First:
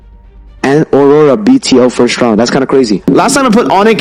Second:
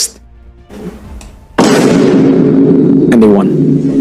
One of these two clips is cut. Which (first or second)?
first